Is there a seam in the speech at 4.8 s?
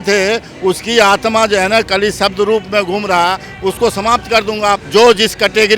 yes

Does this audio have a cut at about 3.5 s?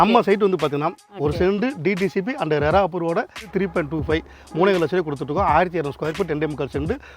yes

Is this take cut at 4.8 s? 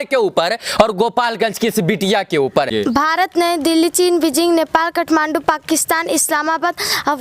no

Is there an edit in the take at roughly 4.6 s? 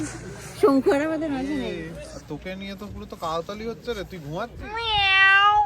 yes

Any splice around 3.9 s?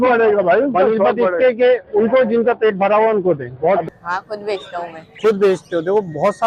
yes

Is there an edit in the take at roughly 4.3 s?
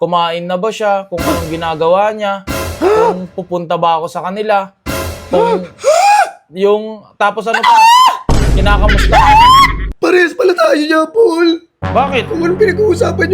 no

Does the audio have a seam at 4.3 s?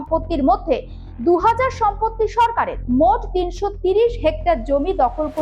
no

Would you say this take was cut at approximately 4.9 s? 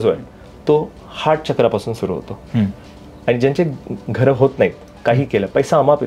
no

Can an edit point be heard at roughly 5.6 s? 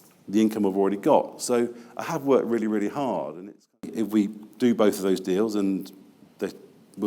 no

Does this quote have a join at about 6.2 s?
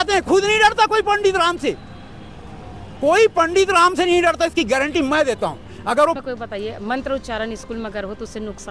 yes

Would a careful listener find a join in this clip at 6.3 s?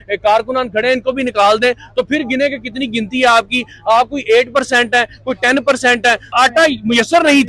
yes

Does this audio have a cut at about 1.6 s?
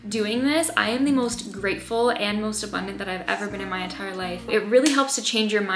no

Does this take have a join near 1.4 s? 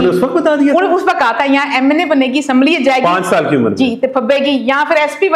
no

